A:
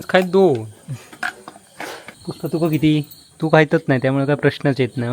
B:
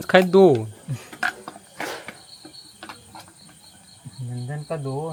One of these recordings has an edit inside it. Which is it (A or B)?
A